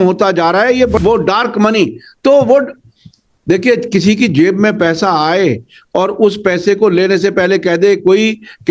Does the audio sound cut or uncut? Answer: cut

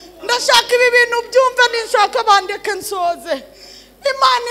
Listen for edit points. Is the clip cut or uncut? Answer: uncut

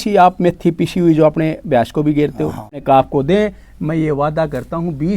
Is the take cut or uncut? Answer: cut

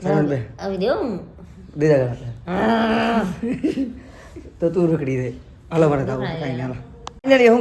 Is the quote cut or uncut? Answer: uncut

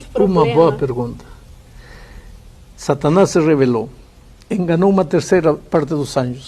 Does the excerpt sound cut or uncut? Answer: cut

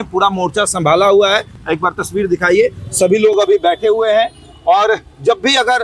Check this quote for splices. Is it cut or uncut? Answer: uncut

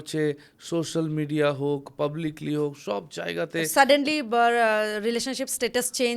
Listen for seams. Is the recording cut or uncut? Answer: uncut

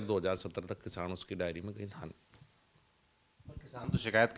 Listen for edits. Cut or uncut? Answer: uncut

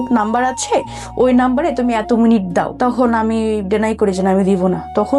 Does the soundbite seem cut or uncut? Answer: cut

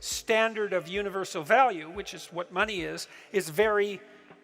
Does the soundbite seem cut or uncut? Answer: uncut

